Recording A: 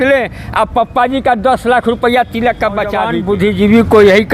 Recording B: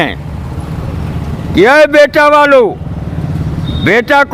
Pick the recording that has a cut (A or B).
A